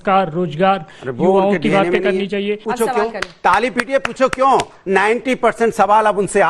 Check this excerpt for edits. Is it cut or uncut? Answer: cut